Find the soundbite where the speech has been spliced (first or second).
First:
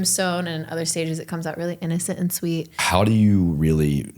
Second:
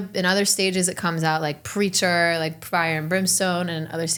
first